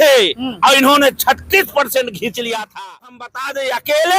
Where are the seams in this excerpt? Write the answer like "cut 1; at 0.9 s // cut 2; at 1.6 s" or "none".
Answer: cut 1; at 3.3 s

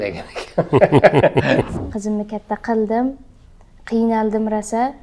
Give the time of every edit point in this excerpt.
cut 1; at 1.8 s

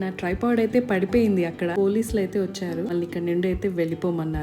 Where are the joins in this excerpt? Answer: cut 1; at 1.7 s // cut 2; at 2.9 s

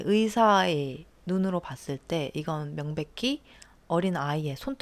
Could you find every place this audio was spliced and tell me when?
none

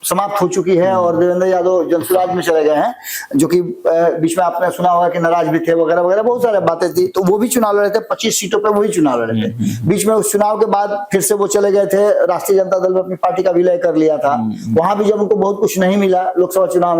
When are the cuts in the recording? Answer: none

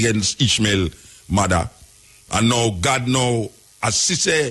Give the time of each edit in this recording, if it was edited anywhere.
none

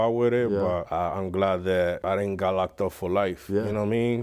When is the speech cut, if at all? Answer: cut 1; at 0.9 s // cut 2; at 2.0 s

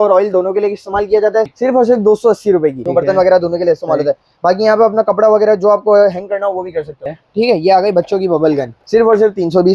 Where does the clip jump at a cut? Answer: cut 1; at 1.5 s // cut 2; at 2.8 s // cut 3; at 7.0 s // cut 4; at 8.8 s

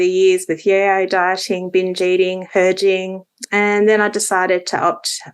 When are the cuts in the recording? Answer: cut 1; at 2.4 s

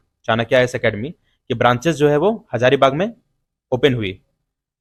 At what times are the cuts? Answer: none

